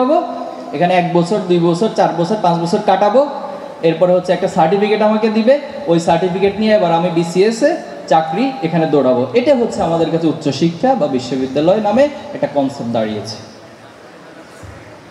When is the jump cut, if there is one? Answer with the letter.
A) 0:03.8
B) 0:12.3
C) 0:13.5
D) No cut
D